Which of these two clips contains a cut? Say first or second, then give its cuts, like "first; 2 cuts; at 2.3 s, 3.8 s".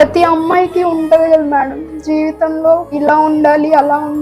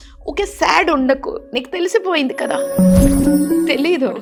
first; 1 cut; at 2.9 s